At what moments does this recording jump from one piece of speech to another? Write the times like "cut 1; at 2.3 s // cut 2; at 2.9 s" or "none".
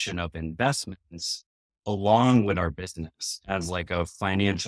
none